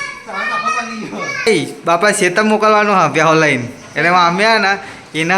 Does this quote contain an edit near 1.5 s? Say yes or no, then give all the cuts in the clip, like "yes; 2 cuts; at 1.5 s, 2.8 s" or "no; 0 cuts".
yes; 1 cut; at 1.5 s